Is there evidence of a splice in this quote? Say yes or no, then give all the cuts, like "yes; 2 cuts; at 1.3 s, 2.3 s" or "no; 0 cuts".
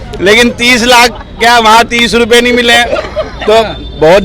no; 0 cuts